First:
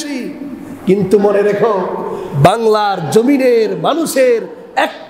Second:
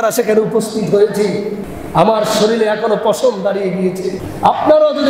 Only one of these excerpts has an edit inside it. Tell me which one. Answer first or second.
second